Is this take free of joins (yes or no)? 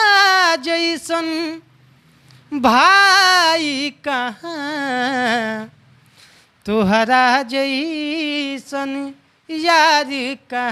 yes